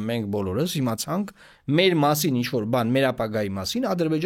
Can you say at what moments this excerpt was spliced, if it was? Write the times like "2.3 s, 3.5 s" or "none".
none